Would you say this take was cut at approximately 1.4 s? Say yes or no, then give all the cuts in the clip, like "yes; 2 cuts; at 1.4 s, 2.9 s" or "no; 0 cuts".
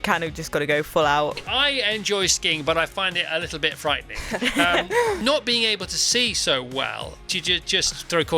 yes; 3 cuts; at 1.4 s, 5.2 s, 7.2 s